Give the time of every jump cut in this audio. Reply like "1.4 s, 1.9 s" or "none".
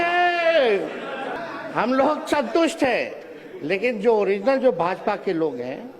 1.3 s